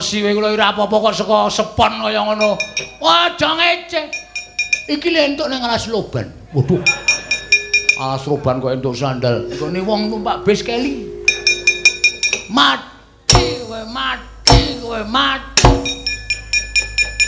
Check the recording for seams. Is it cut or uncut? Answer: uncut